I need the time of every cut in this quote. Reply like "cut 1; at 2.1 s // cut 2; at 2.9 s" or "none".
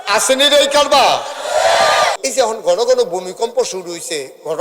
cut 1; at 2.2 s